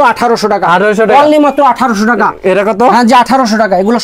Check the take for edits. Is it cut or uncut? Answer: uncut